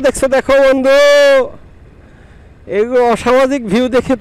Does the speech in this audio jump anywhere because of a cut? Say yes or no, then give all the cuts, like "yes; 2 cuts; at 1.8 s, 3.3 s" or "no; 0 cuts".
no; 0 cuts